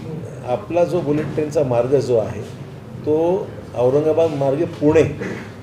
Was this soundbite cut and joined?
no; 0 cuts

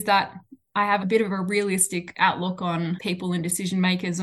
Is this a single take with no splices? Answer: no; 2 cuts; at 1.0 s, 3.0 s

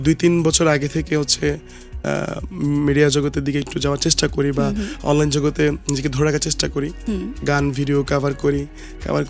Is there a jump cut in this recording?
no; 0 cuts

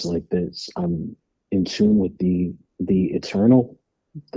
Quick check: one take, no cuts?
no; 1 cut; at 2.7 s

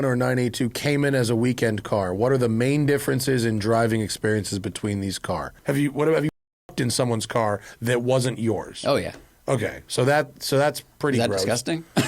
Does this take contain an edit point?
yes; 1 cut; at 5.5 s

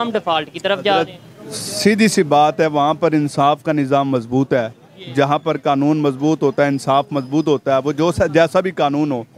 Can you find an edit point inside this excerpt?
no; 0 cuts

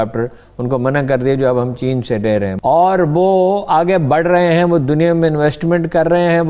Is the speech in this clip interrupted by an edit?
yes; 1 cut; at 2.5 s

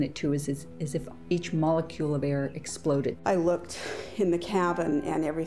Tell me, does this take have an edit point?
yes; 1 cut; at 3.1 s

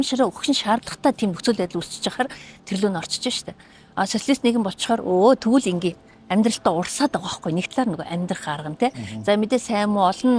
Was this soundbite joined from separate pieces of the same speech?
no; 0 cuts

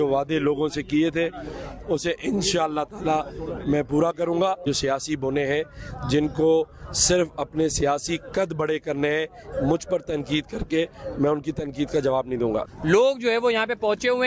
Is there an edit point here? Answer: yes; 2 cuts; at 4.6 s, 12.7 s

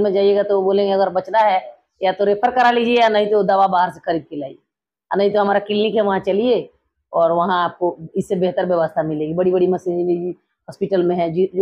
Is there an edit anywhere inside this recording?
no; 0 cuts

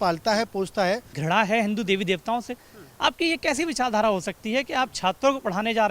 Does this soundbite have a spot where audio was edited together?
yes; 1 cut; at 1.1 s

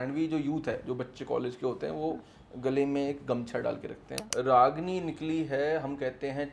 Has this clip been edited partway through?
yes; 1 cut; at 4.2 s

